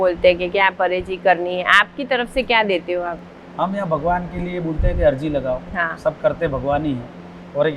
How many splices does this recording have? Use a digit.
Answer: 0